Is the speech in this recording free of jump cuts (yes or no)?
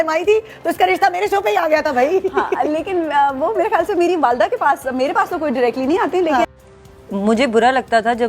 no